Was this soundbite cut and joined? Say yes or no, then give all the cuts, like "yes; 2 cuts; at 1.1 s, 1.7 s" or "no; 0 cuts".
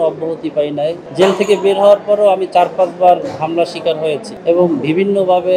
yes; 2 cuts; at 1.0 s, 4.3 s